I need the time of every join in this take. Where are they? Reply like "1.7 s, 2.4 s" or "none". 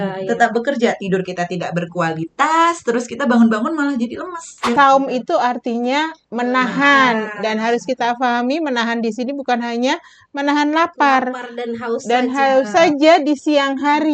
4.7 s